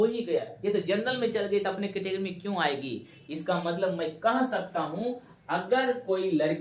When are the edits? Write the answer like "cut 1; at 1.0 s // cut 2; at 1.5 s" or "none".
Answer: none